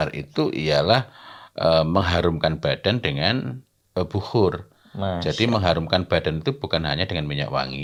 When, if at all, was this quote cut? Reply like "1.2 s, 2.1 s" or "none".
none